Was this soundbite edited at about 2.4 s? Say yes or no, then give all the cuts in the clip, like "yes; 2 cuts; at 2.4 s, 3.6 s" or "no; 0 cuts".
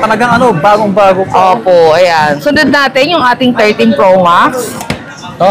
yes; 1 cut; at 2.4 s